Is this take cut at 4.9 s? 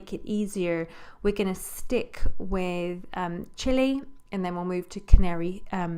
yes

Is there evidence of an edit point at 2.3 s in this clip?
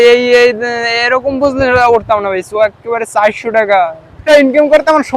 no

